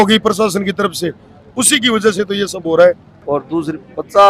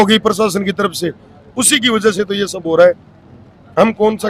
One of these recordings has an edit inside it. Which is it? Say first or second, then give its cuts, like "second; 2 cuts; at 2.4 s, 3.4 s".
first; 1 cut; at 3.1 s